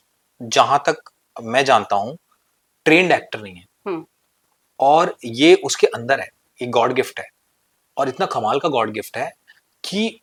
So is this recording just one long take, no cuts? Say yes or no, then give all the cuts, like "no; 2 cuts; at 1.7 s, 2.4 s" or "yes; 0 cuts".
yes; 0 cuts